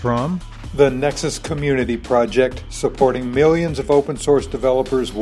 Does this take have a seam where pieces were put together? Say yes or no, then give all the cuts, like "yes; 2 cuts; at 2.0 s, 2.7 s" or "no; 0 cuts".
no; 0 cuts